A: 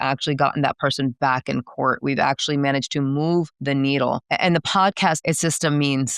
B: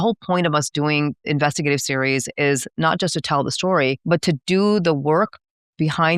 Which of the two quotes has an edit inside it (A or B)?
B